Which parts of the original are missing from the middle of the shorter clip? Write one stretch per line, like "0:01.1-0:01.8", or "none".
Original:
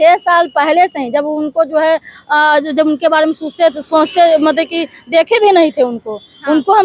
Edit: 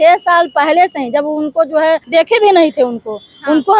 0:02.0-0:05.0